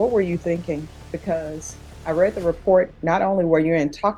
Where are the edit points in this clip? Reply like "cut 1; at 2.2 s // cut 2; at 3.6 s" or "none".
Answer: none